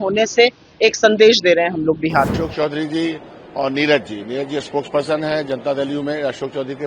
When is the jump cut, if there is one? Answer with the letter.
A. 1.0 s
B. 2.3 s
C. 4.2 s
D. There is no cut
B